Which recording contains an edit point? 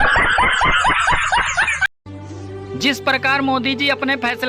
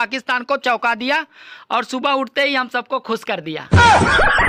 first; 1 cut; at 1.9 s

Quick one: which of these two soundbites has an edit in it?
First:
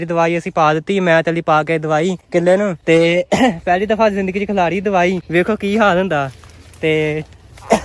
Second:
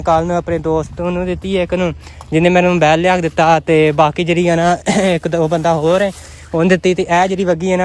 first; 2 cuts; at 2.5 s, 5.2 s

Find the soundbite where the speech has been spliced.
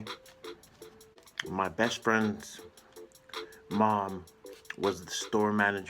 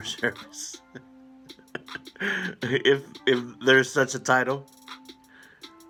first; 1 cut; at 1.3 s

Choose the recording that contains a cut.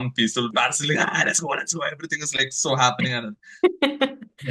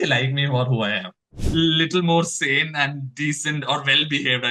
second; 1 cut; at 1.4 s

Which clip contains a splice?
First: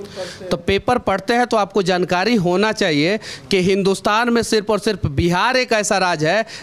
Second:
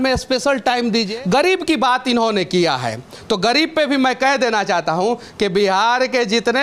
second; 1 cut; at 1.1 s

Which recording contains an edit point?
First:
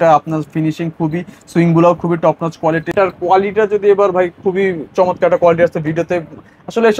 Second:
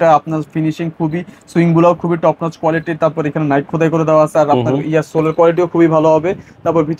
first; 1 cut; at 2.9 s

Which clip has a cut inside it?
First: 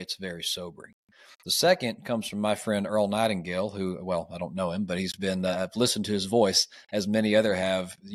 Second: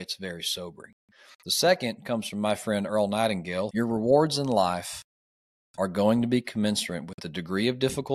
second; 1 cut; at 3.7 s

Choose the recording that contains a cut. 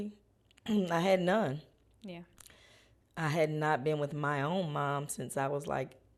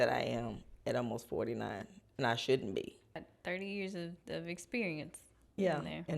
second; 1 cut; at 3.2 s

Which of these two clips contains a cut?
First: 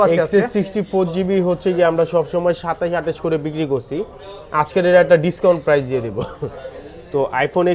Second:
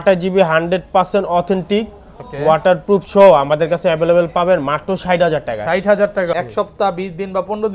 second; 1 cut; at 6.3 s

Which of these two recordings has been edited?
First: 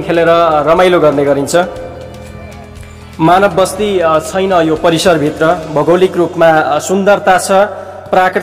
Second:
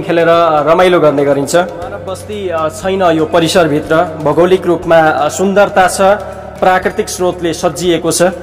second; 1 cut; at 2.3 s

